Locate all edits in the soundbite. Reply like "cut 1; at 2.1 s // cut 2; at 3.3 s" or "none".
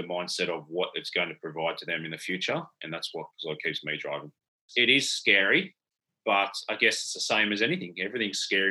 cut 1; at 4.6 s